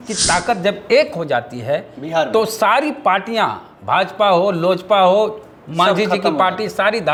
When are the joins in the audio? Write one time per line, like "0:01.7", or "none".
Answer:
none